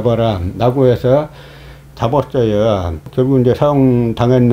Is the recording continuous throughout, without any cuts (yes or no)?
no